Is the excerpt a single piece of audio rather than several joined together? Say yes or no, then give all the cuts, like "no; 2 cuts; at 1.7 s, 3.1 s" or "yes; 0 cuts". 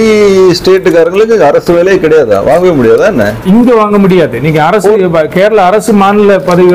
yes; 0 cuts